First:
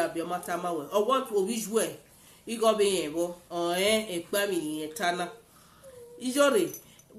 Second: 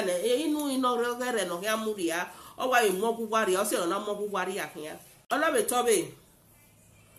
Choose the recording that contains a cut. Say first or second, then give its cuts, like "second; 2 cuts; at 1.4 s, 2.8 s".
second; 1 cut; at 5.2 s